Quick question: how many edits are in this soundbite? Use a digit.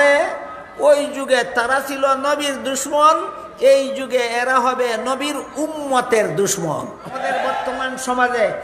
1